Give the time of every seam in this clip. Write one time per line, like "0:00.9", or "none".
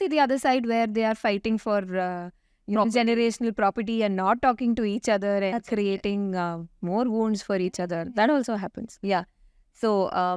none